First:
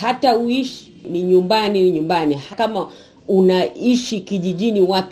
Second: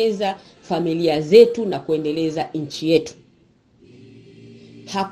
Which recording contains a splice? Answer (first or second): first